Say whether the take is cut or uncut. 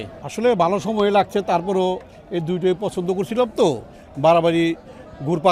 uncut